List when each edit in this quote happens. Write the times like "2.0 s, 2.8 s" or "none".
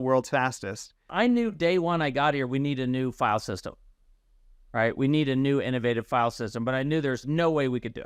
1.1 s